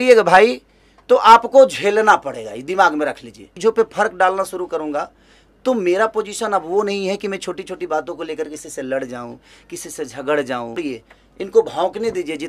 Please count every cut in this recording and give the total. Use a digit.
2